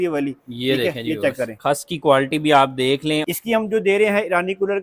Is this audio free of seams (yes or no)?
no